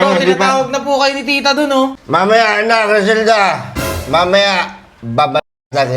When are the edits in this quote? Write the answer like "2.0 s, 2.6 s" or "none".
2.0 s

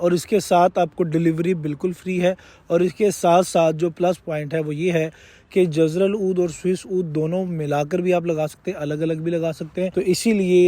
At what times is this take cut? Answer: none

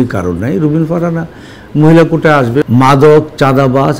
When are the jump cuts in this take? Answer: 2.6 s

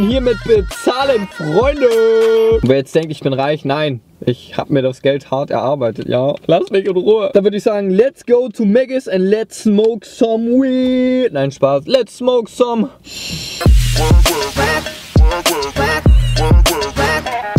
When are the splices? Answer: none

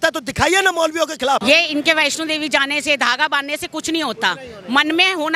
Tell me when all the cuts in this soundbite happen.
1.4 s

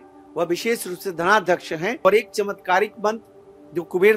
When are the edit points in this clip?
2.1 s

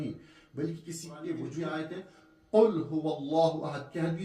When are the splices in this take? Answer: 1.6 s

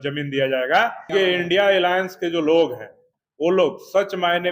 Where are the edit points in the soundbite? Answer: 1.1 s, 3.1 s

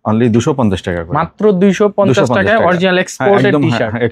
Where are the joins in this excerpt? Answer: none

